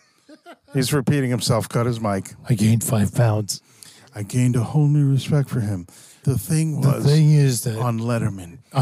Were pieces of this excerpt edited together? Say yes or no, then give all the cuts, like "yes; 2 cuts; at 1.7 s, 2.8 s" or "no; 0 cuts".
yes; 1 cut; at 6.2 s